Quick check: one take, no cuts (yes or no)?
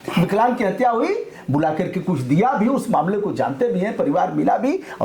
yes